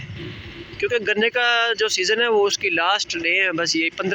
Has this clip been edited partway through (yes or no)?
no